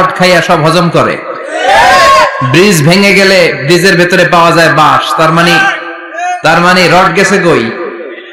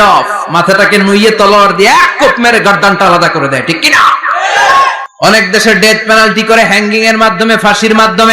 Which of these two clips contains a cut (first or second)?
second